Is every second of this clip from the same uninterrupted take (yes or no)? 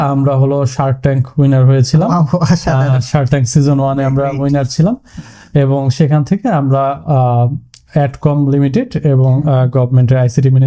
yes